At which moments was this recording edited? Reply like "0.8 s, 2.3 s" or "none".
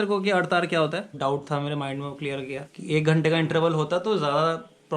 1.1 s